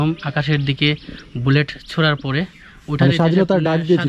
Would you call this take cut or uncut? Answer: uncut